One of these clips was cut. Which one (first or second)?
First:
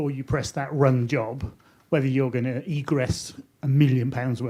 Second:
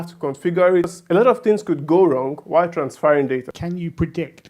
second